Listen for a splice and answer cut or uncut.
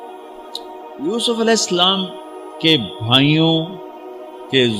cut